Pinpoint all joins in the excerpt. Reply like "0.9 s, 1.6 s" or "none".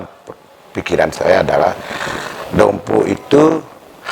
none